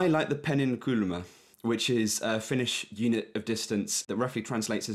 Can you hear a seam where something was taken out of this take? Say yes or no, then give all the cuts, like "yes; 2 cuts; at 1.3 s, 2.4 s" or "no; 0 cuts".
yes; 2 cuts; at 1.5 s, 4.1 s